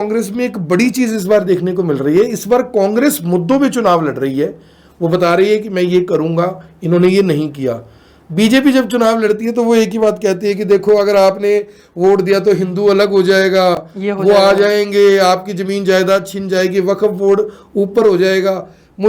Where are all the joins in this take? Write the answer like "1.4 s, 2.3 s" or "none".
none